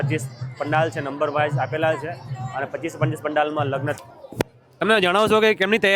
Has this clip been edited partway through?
yes; 1 cut; at 3.9 s

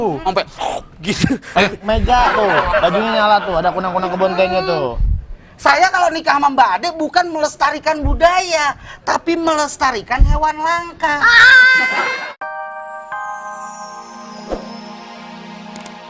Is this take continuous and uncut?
no; 1 cut; at 12.1 s

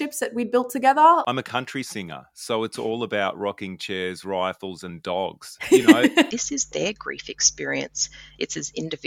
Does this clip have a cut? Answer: yes; 2 cuts; at 1.3 s, 6.3 s

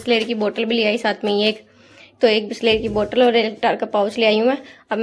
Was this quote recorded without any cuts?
yes; 0 cuts

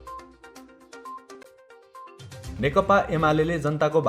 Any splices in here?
yes; 1 cut; at 1.5 s

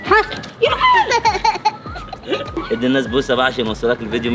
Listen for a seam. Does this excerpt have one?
yes; 1 cut; at 2.6 s

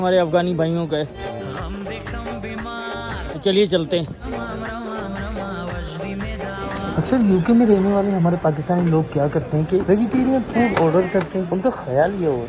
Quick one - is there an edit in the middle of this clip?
no; 0 cuts

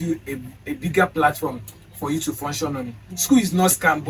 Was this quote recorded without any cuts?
yes; 0 cuts

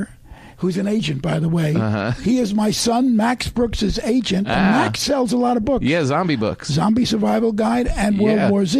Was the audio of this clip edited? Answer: no; 0 cuts

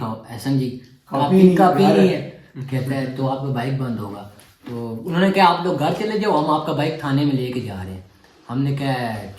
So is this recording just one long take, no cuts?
yes; 0 cuts

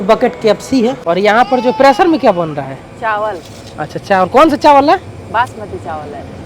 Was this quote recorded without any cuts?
no; 1 cut; at 1.0 s

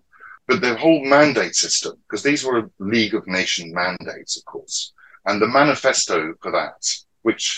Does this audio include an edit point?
no; 0 cuts

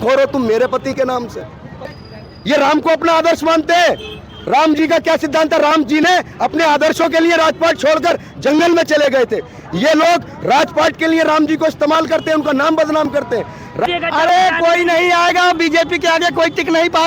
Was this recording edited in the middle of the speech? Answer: yes; 2 cuts; at 2.0 s, 13.9 s

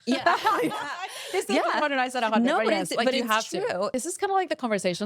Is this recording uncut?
no; 1 cut; at 3.9 s

